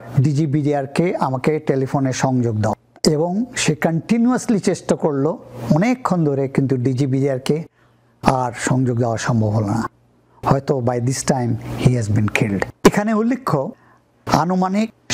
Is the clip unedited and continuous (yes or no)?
yes